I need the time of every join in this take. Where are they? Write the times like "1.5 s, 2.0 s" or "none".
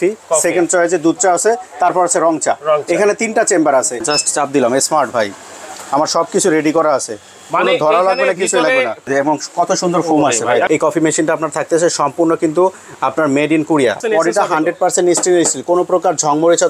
4.0 s, 9.1 s, 10.7 s, 14.0 s